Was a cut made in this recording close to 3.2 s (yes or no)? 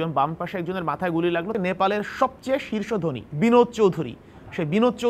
yes